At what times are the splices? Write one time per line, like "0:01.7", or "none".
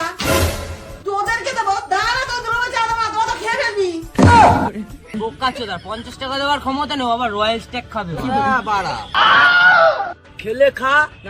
0:05.1